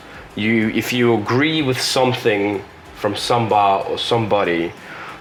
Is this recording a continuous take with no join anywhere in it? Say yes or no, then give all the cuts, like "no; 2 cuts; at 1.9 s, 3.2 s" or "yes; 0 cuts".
yes; 0 cuts